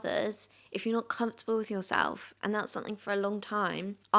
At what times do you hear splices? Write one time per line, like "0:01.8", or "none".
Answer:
none

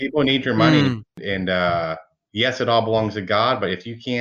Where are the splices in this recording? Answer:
0:01.2

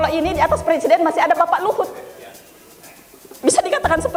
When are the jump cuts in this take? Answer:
none

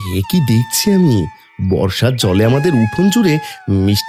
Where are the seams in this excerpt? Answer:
none

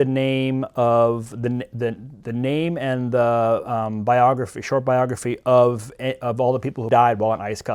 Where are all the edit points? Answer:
0:06.8

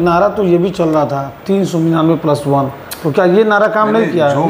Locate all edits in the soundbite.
none

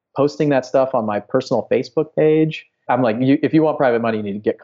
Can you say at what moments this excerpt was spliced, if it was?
0:02.9

